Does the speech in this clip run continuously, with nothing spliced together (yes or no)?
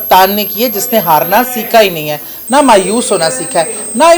yes